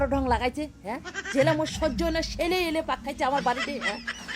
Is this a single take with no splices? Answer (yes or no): yes